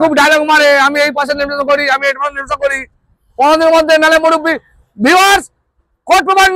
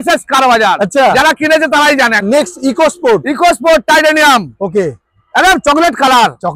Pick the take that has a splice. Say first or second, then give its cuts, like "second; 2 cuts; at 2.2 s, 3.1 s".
second; 1 cut; at 2.2 s